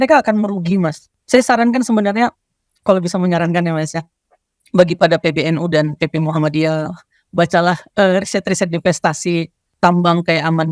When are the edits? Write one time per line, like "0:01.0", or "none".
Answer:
0:01.0
0:09.6